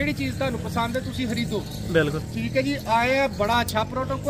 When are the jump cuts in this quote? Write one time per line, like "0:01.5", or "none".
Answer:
none